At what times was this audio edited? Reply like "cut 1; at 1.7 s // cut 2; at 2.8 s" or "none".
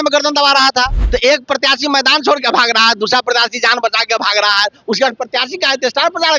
cut 1; at 1.0 s